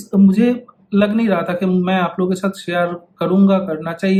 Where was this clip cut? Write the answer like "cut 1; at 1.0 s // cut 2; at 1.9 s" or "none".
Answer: none